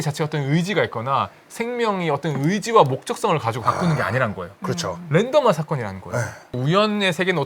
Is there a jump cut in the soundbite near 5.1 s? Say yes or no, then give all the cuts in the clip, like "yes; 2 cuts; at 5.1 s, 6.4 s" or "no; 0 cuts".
no; 2 cuts; at 3.6 s, 6.5 s